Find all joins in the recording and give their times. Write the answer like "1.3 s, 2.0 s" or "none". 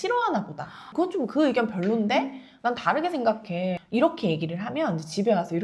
0.9 s, 3.8 s